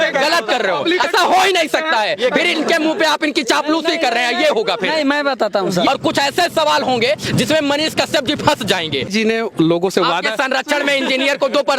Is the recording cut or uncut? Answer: cut